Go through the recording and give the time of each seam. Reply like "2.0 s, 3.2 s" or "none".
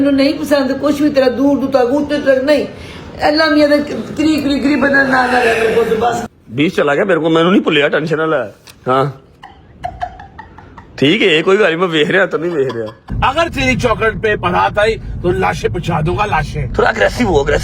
6.2 s, 8.6 s, 13.0 s